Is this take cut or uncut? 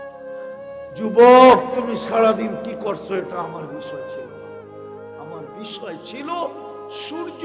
cut